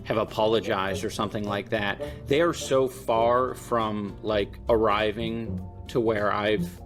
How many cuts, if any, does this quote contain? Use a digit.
0